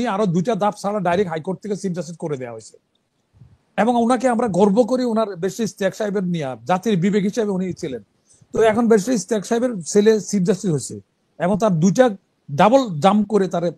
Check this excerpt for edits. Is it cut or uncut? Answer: uncut